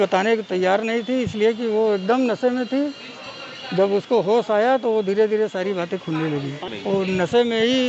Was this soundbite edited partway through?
yes; 1 cut; at 6.7 s

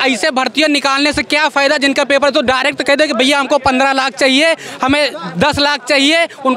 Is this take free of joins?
yes; 0 cuts

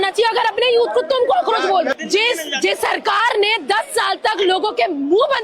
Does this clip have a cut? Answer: yes; 1 cut; at 1.9 s

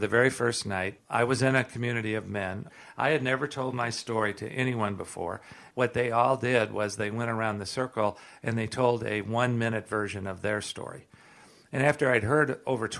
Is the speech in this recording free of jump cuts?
no; 3 cuts; at 1.0 s, 2.6 s, 5.6 s

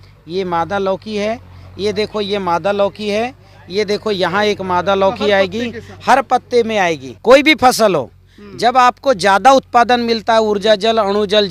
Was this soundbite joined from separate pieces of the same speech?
yes; 1 cut; at 7.1 s

